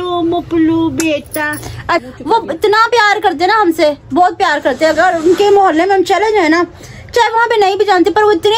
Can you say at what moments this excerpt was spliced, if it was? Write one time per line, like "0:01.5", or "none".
0:02.0

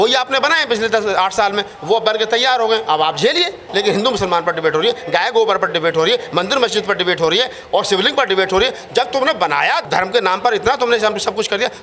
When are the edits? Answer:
0:03.7
0:09.8

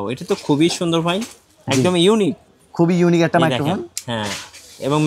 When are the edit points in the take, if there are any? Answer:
none

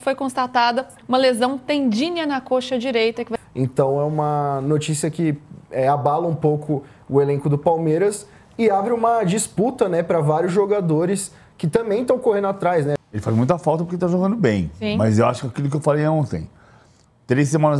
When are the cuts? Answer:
0:03.4
0:12.9

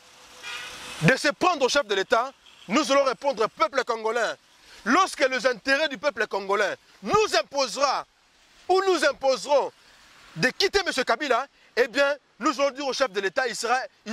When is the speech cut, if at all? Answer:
0:03.6

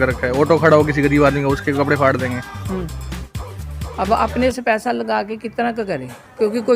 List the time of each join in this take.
0:03.4

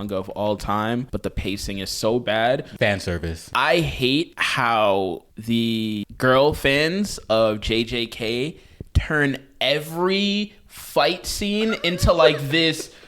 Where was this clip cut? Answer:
0:01.1
0:03.0
0:04.4
0:05.3
0:06.0

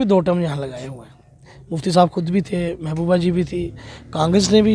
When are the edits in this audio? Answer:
none

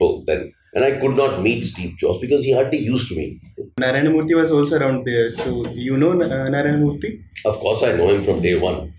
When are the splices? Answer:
0:03.7

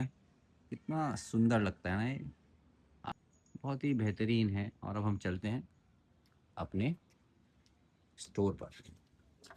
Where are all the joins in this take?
0:03.1

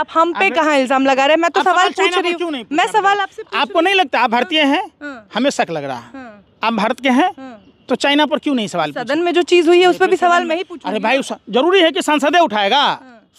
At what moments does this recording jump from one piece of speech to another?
none

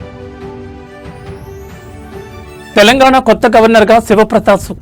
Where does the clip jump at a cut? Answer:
0:02.7

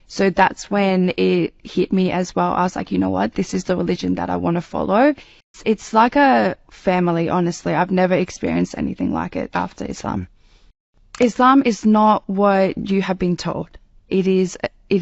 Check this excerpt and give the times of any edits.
0:05.6
0:10.8

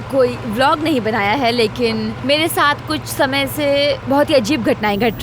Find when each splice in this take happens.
0:02.2
0:04.0

